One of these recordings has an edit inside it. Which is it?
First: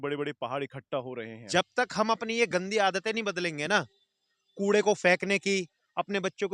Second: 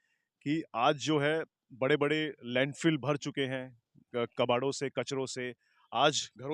first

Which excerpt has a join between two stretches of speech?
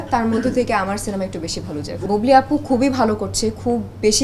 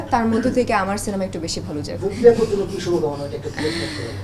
first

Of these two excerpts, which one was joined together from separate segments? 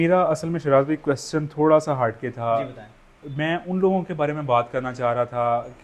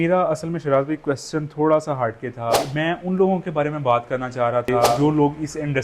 second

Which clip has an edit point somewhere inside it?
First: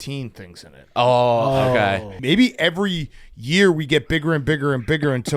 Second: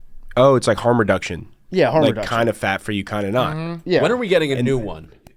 first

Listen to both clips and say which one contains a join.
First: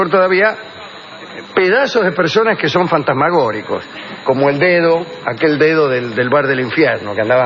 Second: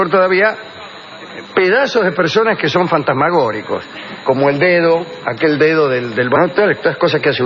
first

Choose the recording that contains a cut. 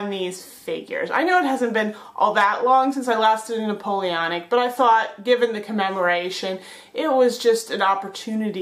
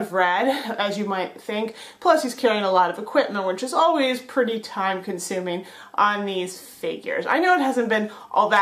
second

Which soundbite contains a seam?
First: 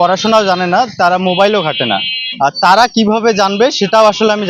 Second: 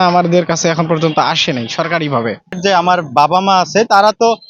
second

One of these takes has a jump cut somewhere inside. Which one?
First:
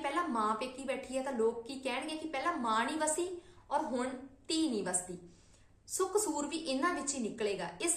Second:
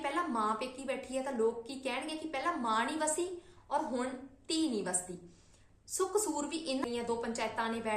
second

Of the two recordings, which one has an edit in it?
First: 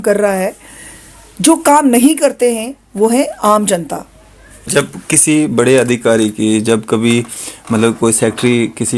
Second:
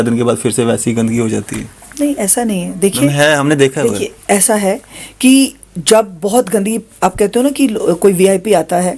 first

